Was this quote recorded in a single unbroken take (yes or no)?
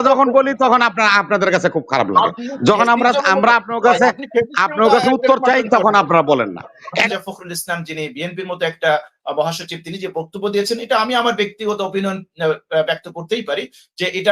no